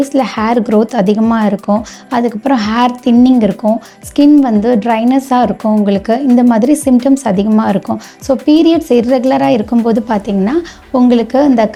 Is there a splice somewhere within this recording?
no; 0 cuts

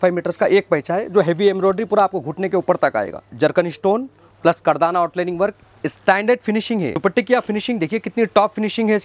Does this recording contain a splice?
yes; 2 cuts; at 3.3 s, 7.0 s

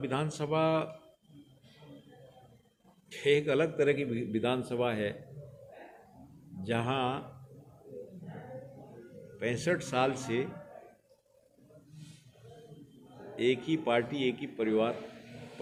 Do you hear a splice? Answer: no; 0 cuts

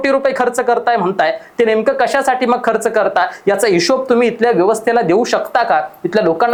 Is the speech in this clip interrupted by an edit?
no; 0 cuts

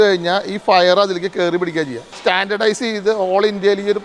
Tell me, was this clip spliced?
yes; 1 cut; at 2.0 s

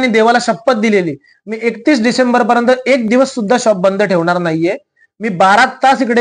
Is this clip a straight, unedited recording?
yes; 0 cuts

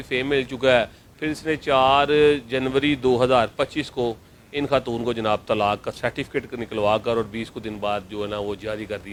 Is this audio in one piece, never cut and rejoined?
yes; 0 cuts

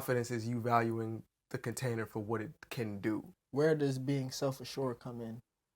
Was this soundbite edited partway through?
yes; 1 cut; at 3.3 s

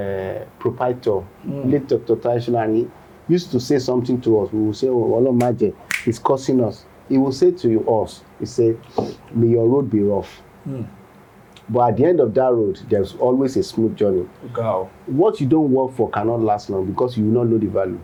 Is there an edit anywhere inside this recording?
no; 0 cuts

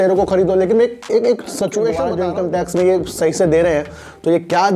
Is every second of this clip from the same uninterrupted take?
no; 1 cut; at 2.1 s

